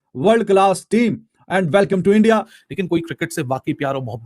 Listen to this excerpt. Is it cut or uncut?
cut